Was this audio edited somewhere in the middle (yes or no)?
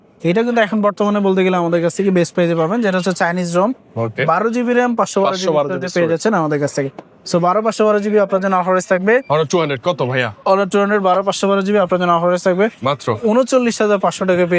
no